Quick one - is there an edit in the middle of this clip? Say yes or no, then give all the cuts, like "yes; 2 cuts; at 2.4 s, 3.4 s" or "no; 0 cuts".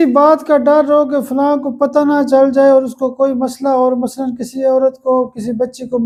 no; 0 cuts